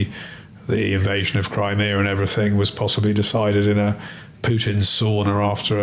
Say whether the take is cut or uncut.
uncut